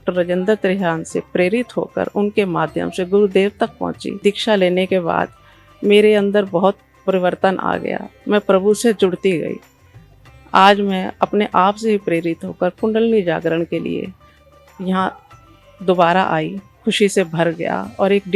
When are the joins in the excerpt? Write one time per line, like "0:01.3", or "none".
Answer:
0:04.1
0:16.6